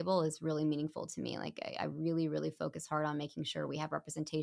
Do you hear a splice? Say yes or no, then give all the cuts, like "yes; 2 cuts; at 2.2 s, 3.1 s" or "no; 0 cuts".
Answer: no; 0 cuts